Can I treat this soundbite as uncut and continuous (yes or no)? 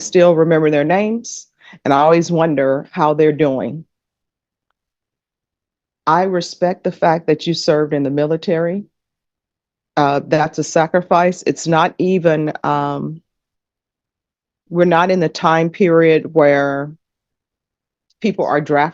yes